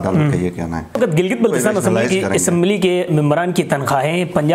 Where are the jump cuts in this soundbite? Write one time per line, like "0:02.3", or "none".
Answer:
0:01.0